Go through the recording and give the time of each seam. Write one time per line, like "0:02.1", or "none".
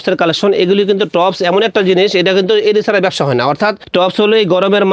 0:03.8